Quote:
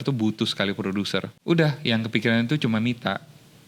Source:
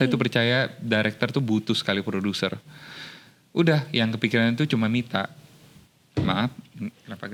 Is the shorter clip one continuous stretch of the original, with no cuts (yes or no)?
no